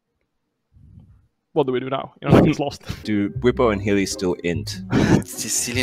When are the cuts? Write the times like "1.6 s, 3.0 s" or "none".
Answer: 2.9 s